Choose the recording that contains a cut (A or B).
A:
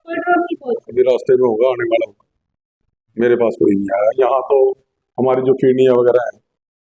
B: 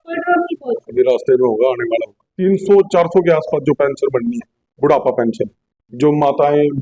B